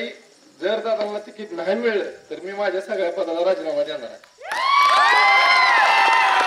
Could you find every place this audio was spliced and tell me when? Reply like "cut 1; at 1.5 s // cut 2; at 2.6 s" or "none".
none